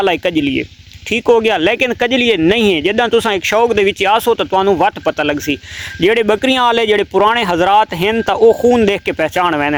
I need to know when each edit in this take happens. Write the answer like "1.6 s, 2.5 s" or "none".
none